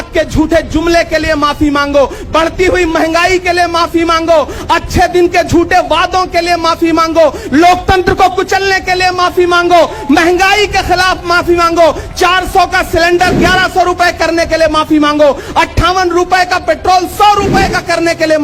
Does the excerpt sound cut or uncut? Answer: uncut